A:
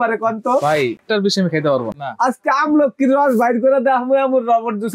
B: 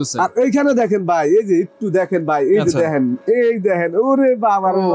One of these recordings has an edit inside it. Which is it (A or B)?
A